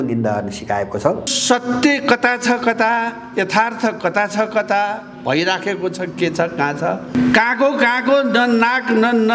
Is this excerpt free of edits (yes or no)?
no